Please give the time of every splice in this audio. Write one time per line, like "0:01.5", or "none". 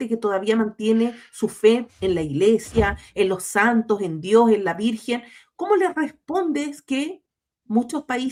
none